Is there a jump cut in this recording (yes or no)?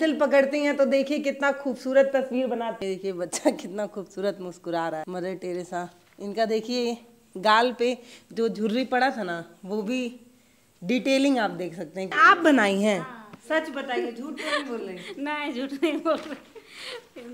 yes